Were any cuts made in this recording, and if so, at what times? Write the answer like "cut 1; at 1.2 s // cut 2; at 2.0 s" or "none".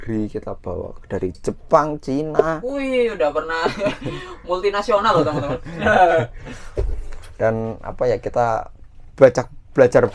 none

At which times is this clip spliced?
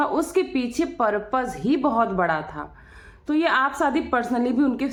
none

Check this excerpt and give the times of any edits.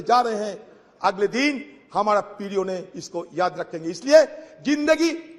none

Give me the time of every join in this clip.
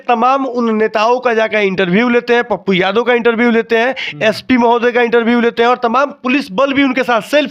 none

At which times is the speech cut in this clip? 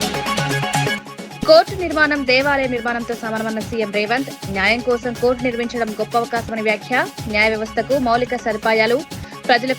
cut 1; at 0.9 s

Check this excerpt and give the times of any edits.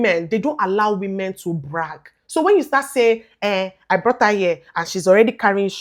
none

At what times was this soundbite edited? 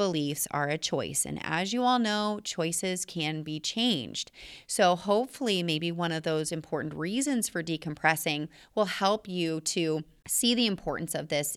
cut 1; at 10.2 s

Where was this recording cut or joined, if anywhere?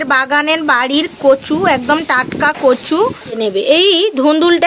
cut 1; at 3.4 s

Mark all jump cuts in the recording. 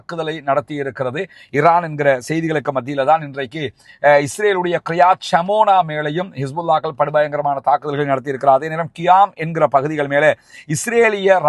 none

